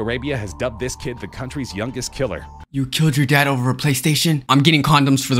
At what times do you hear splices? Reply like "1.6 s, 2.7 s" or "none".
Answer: 4.4 s